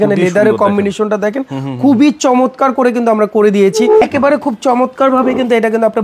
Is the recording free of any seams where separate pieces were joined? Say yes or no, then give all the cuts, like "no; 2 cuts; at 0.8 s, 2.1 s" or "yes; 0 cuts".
no; 1 cut; at 4.0 s